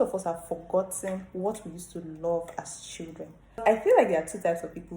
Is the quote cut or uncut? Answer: cut